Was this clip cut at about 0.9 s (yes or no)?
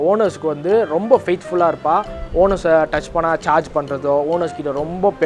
no